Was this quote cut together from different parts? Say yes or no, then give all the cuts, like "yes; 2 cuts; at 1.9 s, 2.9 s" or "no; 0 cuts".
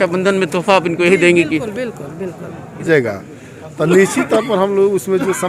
yes; 1 cut; at 2.9 s